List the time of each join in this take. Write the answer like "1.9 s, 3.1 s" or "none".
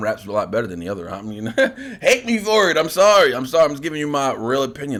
none